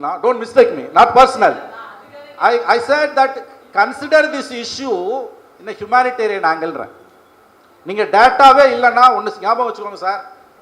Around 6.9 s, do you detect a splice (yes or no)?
no